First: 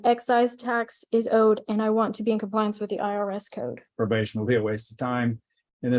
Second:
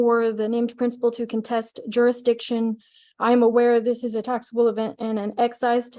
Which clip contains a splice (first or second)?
first